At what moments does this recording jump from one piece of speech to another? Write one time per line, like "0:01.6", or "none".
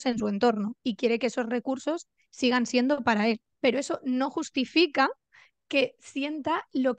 0:03.5